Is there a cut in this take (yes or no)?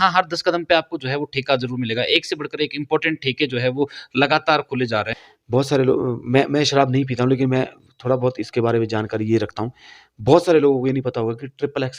yes